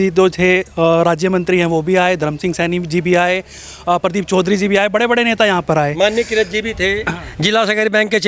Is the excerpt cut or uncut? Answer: uncut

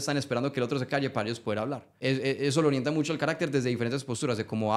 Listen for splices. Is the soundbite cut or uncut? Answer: cut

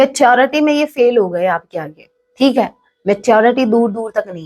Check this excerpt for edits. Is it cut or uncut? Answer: uncut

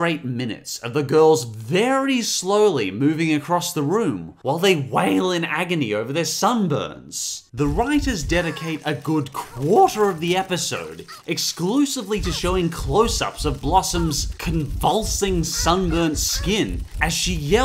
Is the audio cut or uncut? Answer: cut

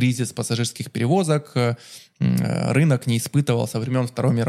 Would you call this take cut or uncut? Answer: uncut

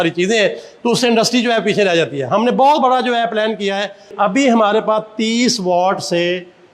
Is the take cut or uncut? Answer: cut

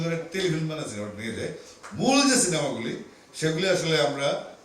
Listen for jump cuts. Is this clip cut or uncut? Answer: uncut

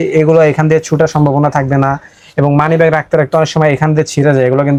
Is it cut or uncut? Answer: uncut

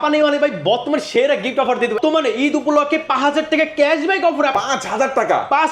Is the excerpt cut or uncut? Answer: cut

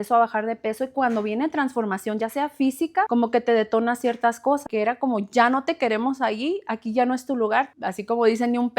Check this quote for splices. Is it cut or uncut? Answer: cut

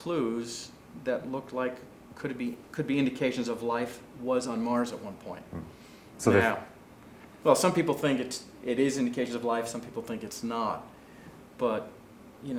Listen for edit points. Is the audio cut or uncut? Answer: uncut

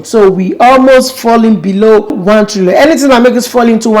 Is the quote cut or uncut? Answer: cut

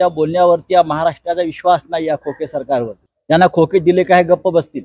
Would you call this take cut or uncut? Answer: cut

